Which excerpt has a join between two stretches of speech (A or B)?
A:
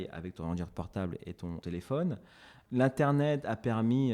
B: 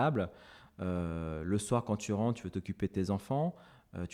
A